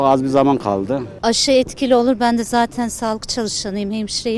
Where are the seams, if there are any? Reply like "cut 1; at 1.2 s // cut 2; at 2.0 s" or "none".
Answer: cut 1; at 1.1 s